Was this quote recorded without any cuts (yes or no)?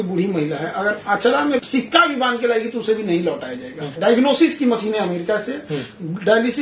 no